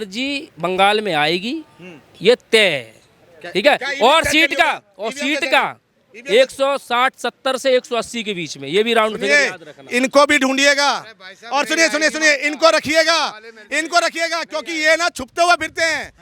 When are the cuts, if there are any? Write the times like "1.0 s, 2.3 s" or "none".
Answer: none